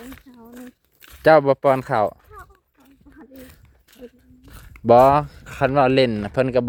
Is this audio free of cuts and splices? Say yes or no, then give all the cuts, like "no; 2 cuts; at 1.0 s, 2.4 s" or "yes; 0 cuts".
yes; 0 cuts